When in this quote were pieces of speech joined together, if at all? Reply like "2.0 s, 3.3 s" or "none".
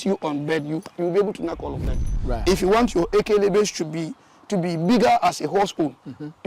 2.2 s